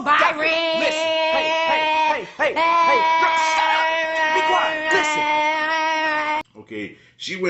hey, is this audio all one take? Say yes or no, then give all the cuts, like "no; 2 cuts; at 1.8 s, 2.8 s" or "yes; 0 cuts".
no; 1 cut; at 6.5 s